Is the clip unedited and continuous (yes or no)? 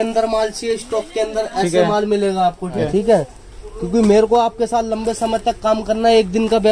no